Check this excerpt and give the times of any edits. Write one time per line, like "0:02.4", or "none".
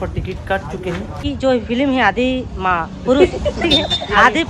0:01.2